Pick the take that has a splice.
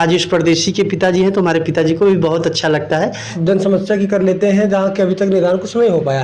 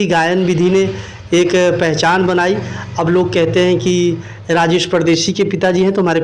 first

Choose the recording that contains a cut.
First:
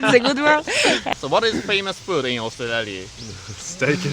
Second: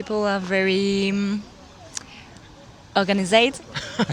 first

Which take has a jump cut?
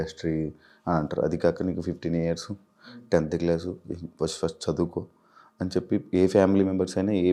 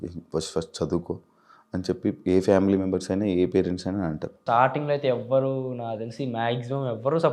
second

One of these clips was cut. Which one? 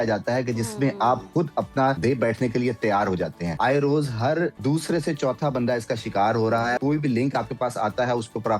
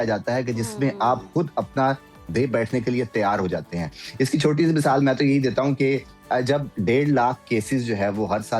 first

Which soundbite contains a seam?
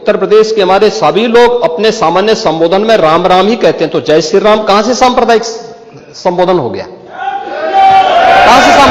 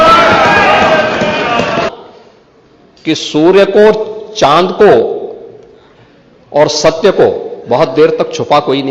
second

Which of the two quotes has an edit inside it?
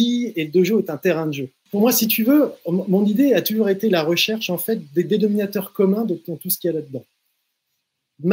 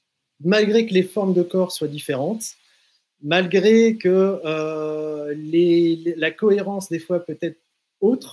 first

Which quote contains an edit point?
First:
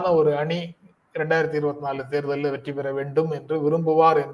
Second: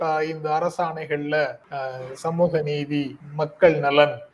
second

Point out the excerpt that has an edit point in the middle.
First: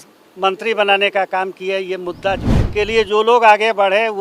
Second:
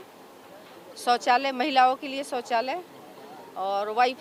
first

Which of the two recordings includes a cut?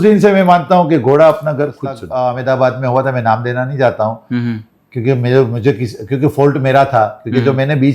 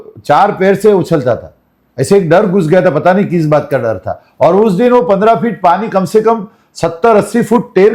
first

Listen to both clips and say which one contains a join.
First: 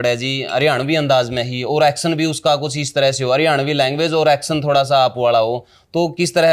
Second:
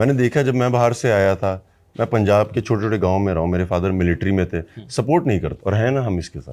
second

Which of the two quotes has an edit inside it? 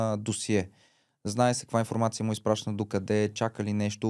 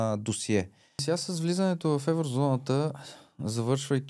second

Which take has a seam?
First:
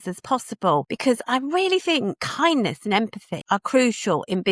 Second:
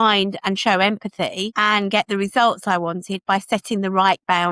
first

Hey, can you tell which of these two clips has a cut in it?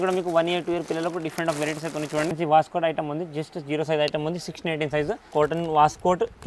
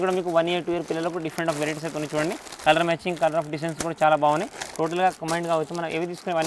first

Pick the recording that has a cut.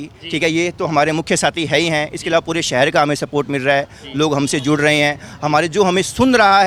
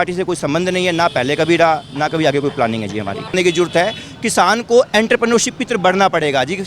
second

